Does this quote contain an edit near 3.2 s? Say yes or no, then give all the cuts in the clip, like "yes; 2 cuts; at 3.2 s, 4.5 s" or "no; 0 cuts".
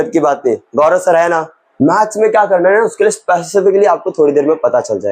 no; 1 cut; at 1.6 s